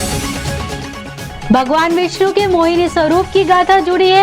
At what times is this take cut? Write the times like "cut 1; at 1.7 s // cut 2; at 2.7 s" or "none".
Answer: none